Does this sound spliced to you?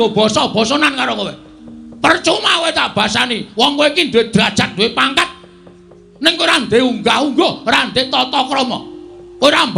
no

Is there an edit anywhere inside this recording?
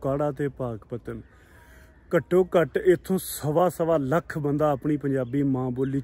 no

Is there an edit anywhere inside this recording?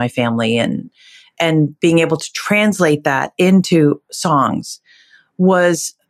no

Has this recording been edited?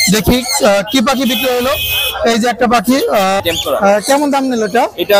yes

